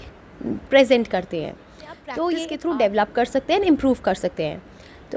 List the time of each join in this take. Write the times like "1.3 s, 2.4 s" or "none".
2.5 s